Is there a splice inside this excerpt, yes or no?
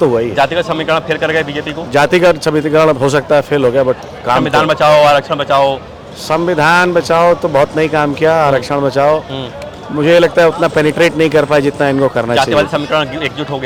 no